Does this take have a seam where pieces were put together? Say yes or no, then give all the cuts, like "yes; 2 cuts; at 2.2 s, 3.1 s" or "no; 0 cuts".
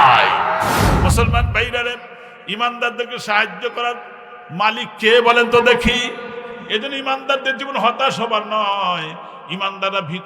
yes; 1 cut; at 1.0 s